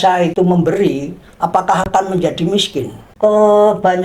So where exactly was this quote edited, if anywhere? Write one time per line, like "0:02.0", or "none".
0:03.0